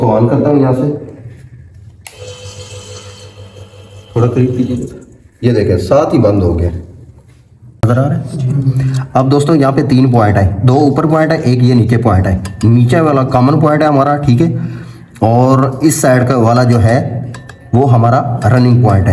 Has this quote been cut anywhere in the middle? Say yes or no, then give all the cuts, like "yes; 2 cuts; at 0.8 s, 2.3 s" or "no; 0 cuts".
yes; 1 cut; at 7.8 s